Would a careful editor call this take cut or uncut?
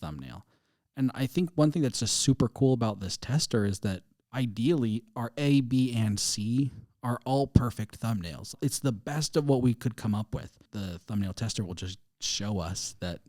cut